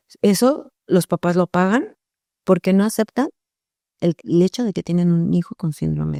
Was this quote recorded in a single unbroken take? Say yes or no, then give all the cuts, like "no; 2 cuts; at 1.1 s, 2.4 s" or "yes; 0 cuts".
yes; 0 cuts